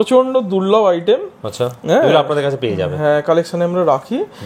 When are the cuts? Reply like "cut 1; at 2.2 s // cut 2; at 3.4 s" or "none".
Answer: none